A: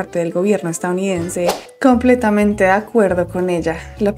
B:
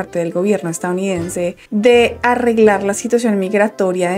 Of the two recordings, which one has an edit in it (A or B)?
A